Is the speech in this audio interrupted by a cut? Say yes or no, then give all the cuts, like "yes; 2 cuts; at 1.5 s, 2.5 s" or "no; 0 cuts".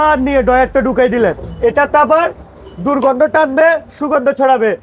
yes; 1 cut; at 1.5 s